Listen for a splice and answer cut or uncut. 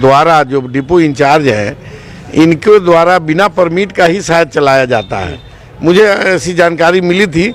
uncut